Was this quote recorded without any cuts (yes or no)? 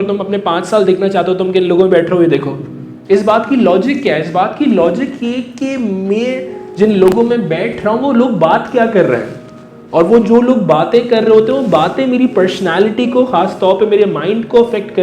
yes